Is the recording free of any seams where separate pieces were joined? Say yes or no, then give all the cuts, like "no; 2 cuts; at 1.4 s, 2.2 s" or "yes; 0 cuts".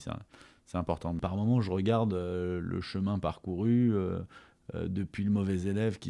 no; 1 cut; at 1.2 s